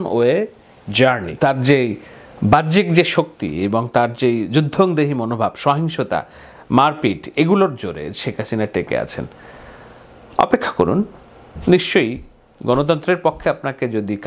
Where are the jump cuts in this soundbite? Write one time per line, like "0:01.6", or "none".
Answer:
0:01.3